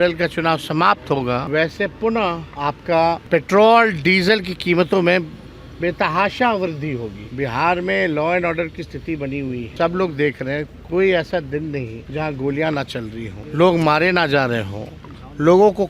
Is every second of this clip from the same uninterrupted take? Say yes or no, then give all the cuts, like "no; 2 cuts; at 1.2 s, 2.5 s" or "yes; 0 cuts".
no; 7 cuts; at 1.4 s, 2.5 s, 3.2 s, 7.2 s, 9.7 s, 12.0 s, 13.4 s